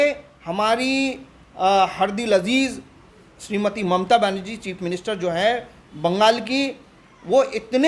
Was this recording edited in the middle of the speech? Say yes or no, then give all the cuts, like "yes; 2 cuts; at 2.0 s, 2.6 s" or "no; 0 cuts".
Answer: no; 0 cuts